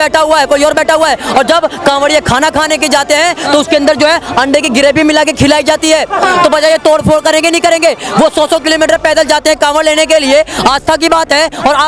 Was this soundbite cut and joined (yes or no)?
no